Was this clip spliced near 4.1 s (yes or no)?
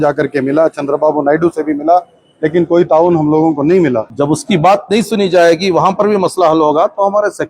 yes